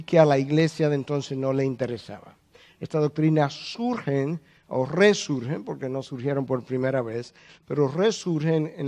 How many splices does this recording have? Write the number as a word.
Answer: zero